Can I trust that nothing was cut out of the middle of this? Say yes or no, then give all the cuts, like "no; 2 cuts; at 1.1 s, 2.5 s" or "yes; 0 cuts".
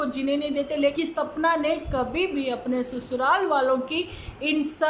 no; 1 cut; at 0.9 s